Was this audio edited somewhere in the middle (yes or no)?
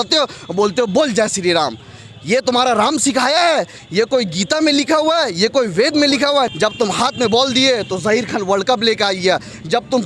yes